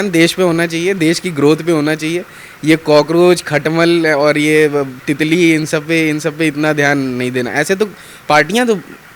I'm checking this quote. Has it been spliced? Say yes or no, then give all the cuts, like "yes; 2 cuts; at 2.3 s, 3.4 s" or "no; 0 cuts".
no; 0 cuts